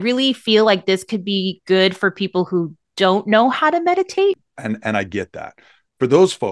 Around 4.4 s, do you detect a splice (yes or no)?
yes